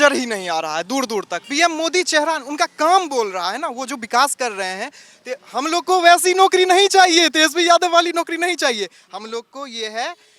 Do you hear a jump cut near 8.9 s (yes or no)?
no